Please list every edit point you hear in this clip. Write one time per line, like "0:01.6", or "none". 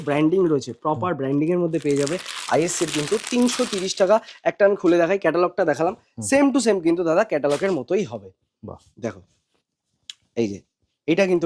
none